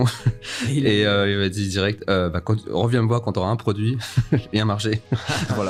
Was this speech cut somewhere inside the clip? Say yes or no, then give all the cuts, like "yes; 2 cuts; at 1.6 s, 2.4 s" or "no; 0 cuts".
no; 0 cuts